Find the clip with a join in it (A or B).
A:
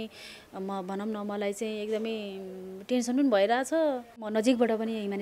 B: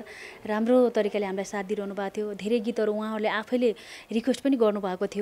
A